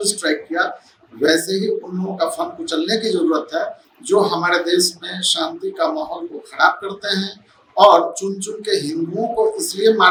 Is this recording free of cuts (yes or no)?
yes